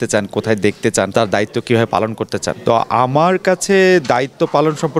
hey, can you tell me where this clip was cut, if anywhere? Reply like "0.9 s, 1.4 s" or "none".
1.1 s, 2.6 s